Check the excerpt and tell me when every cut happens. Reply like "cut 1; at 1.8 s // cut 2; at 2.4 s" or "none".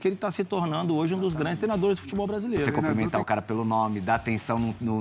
cut 1; at 2.8 s